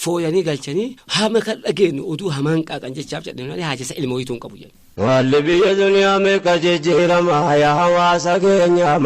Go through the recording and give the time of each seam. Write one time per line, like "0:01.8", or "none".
0:01.0
0:05.1